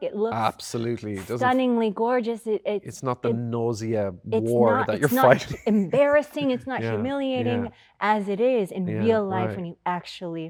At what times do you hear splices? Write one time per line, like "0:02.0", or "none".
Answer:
none